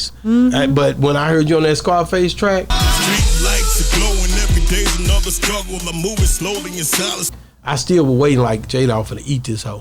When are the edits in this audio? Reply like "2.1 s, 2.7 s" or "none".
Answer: none

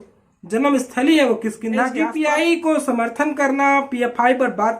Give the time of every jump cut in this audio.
2.0 s

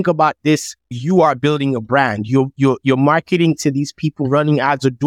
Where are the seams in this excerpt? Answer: 0.9 s

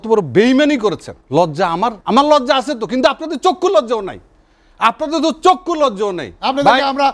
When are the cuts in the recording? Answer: 1.1 s, 2.0 s

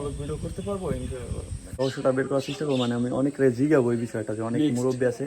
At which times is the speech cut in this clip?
1.8 s

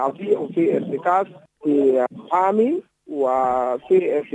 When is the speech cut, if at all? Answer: 1.4 s, 2.1 s

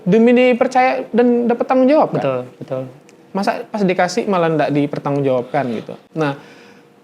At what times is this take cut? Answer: none

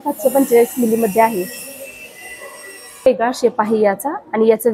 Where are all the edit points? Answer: 3.1 s

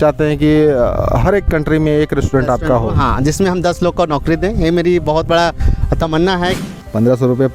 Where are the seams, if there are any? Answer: 6.6 s

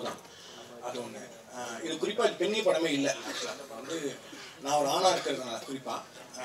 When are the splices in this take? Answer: none

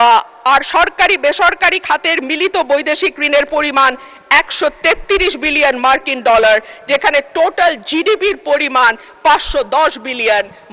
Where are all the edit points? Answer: none

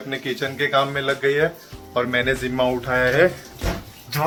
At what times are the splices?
none

